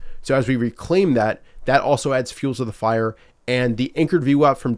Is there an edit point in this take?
no; 0 cuts

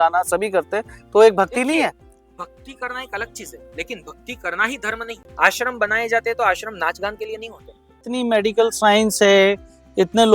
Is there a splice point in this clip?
yes; 2 cuts; at 5.2 s, 8.0 s

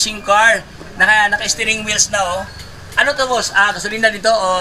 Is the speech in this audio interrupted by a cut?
no; 0 cuts

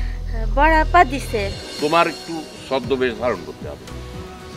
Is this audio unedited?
no; 1 cut; at 1.6 s

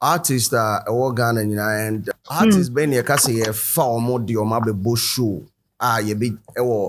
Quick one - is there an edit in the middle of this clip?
yes; 1 cut; at 2.1 s

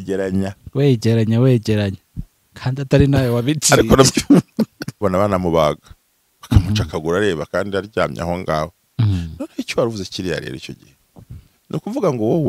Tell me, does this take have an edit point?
yes; 1 cut; at 5.0 s

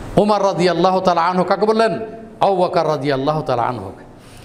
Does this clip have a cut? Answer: no; 0 cuts

